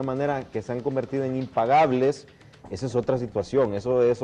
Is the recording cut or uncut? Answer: uncut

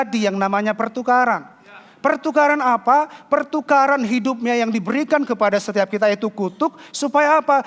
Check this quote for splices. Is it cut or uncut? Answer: uncut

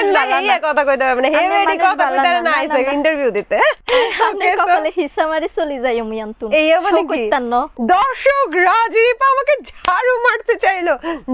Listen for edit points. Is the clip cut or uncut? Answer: cut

